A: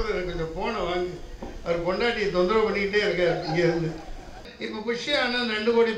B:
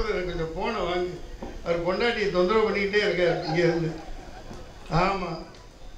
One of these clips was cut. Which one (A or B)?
A